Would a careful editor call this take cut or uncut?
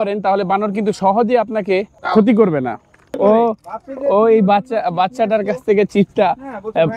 cut